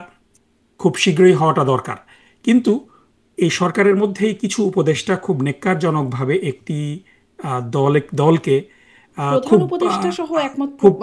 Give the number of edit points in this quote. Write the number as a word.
zero